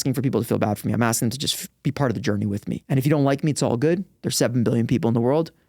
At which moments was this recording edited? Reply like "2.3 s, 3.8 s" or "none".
2.8 s